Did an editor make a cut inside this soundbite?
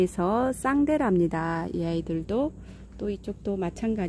no; 0 cuts

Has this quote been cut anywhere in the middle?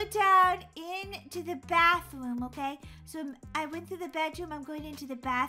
no; 0 cuts

